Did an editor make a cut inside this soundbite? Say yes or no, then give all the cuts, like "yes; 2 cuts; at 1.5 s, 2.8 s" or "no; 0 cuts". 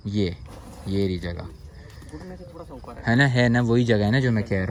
no; 0 cuts